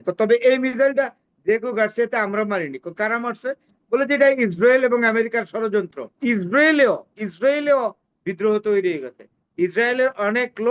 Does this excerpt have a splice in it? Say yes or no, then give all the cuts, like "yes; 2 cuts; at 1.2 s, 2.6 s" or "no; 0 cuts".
yes; 1 cut; at 6.2 s